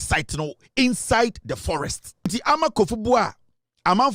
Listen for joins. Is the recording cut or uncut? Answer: cut